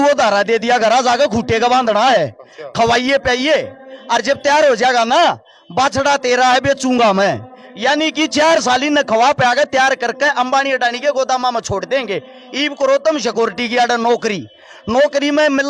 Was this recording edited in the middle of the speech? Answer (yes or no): no